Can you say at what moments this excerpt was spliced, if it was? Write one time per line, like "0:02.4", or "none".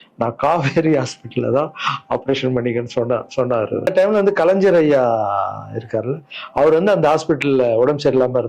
0:03.9